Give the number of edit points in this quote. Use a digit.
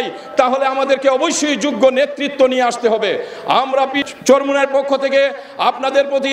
1